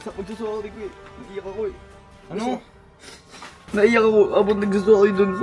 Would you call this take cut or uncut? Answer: uncut